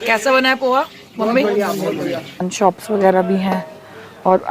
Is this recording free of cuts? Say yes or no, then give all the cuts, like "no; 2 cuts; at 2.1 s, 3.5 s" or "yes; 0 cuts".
no; 1 cut; at 2.5 s